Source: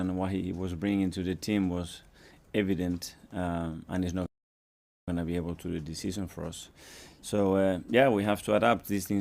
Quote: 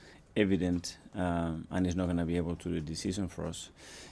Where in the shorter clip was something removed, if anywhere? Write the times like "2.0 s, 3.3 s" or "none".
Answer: 2.1 s